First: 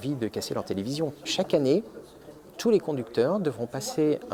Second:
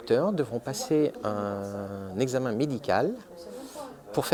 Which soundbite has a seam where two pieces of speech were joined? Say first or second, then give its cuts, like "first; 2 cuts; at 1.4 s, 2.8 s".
first; 1 cut; at 1.3 s